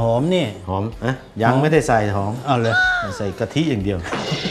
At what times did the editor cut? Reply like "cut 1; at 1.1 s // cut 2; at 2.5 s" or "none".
cut 1; at 0.9 s